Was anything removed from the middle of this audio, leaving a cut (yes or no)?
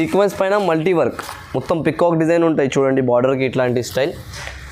no